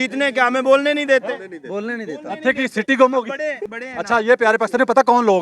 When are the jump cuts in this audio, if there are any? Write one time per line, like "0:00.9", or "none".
0:03.7